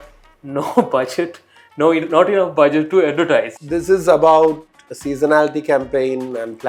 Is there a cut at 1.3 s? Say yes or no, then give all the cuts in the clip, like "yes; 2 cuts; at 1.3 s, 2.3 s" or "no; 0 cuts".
no; 1 cut; at 3.5 s